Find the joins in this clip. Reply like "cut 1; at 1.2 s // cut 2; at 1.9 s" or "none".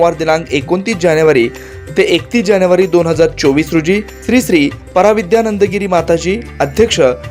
none